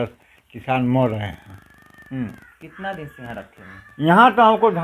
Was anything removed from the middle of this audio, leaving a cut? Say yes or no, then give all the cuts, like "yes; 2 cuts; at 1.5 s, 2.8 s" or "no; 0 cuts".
no; 0 cuts